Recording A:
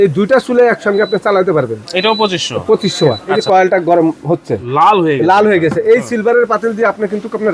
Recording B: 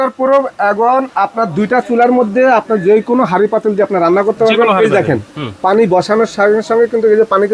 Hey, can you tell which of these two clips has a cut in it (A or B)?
A